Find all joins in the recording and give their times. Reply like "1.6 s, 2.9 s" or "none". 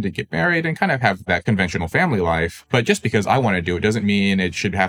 1.2 s, 2.6 s